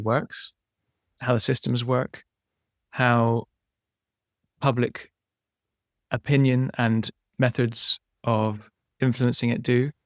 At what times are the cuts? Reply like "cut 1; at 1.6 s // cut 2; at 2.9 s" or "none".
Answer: cut 1; at 1.1 s